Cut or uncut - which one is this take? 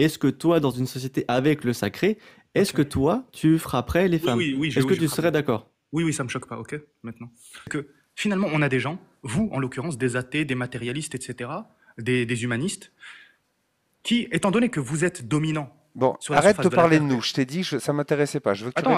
cut